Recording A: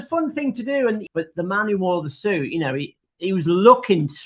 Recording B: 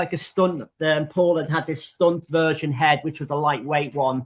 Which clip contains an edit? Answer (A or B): A